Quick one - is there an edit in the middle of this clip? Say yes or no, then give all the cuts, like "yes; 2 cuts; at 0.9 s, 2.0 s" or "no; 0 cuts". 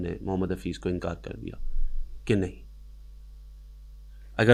no; 0 cuts